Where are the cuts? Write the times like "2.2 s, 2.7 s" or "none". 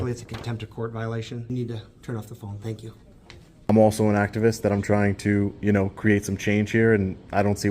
1.5 s, 3.7 s